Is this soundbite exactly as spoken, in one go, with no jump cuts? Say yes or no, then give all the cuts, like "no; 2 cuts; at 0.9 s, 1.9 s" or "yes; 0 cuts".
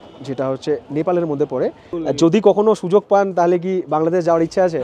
no; 1 cut; at 1.9 s